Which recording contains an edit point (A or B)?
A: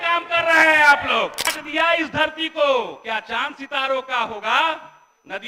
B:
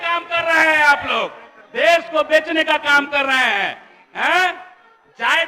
A